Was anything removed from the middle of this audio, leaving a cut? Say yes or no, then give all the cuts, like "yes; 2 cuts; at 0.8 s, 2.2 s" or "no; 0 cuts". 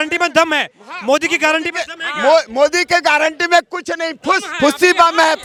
no; 0 cuts